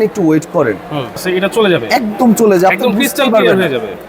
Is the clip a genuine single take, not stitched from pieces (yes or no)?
no